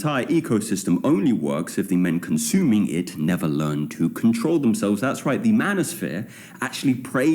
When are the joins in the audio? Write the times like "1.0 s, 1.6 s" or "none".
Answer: 1.0 s